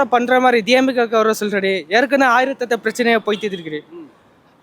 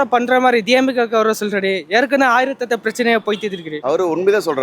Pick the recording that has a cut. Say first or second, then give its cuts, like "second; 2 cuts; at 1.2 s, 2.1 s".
second; 1 cut; at 3.7 s